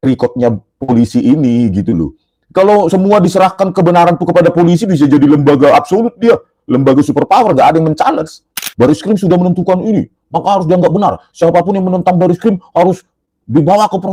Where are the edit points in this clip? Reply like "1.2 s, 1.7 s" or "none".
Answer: 8.6 s